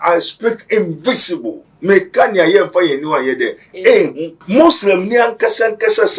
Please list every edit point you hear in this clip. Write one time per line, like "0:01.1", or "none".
0:01.6
0:04.3